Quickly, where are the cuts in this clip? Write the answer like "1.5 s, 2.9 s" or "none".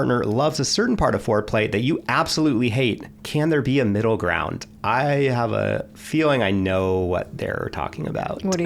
none

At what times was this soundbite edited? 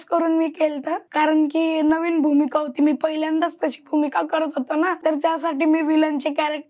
1.0 s, 5.0 s

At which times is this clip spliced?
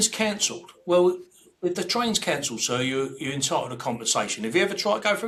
none

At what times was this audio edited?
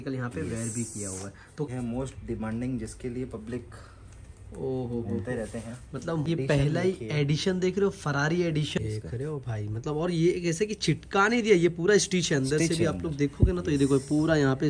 1.7 s, 6.3 s, 8.8 s

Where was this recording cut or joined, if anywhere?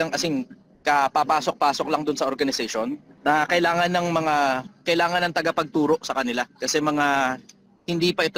3.1 s

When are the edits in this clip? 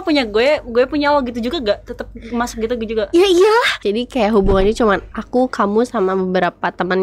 3.8 s

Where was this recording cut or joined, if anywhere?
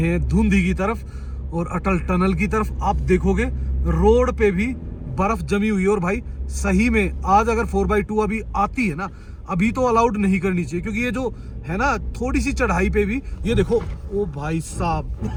none

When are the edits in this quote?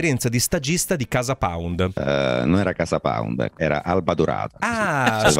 2.0 s, 3.6 s

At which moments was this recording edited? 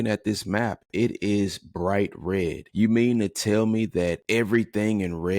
2.6 s, 4.2 s

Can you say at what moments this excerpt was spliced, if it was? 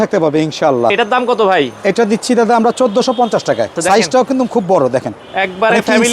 3.8 s

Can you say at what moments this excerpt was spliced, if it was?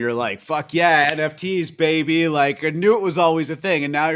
none

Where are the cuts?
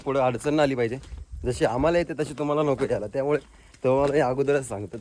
none

